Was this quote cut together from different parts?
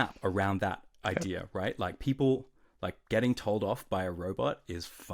no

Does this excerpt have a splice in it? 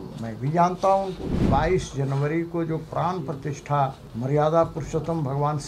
yes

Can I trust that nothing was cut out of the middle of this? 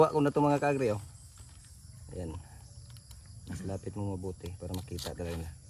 yes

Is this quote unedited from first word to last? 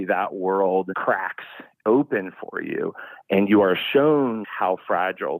no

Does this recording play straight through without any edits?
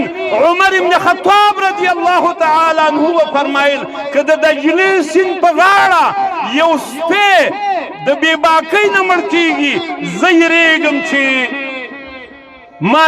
yes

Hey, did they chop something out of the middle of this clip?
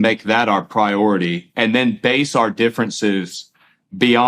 no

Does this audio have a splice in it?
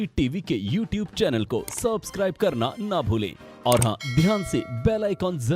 no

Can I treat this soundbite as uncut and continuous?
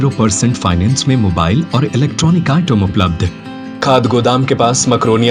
no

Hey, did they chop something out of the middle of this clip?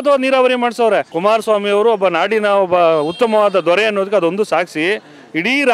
yes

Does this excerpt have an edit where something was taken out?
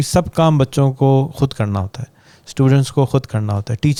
no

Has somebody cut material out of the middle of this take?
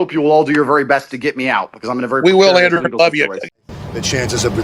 yes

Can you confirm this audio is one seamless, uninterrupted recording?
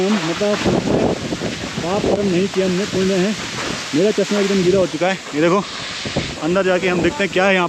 yes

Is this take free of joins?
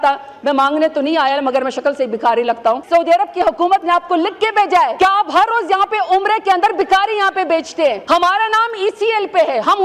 no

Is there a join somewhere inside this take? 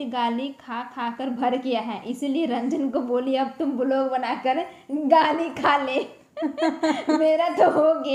no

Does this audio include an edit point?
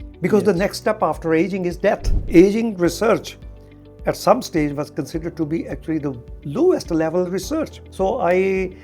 yes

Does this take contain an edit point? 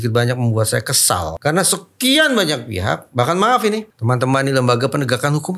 yes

